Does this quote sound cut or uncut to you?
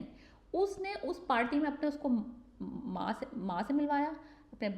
uncut